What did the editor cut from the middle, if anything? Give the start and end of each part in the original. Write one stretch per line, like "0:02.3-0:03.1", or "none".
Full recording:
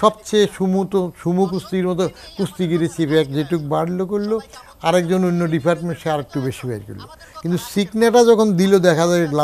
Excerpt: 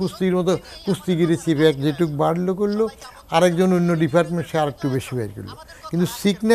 none

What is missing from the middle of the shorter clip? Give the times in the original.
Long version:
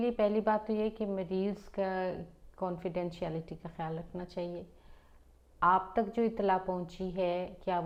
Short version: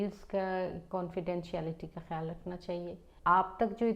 0:02.2-0:02.5
0:04.7-0:05.4

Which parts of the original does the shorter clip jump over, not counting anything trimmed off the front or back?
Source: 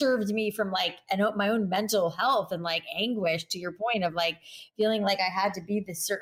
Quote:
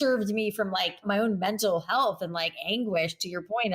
0:01.0-0:01.3

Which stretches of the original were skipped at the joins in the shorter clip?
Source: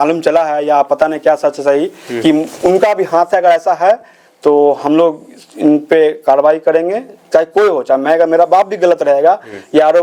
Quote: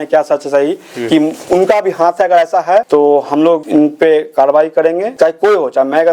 0:04.0-0:04.4
0:05.2-0:05.5
0:07.0-0:07.2

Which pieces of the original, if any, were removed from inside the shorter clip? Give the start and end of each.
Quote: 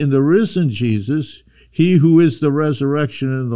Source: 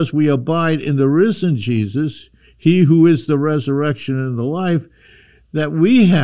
none

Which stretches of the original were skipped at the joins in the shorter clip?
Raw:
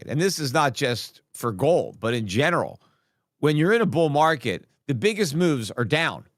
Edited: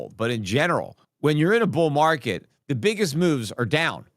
0:02.8-0:03.2

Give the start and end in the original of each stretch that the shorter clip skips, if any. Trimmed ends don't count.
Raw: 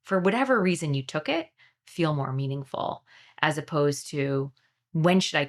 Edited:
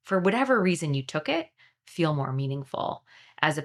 none

